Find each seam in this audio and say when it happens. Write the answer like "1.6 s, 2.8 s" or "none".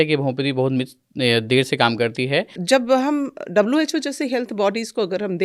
2.6 s